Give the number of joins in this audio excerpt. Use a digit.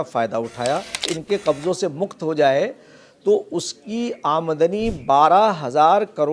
1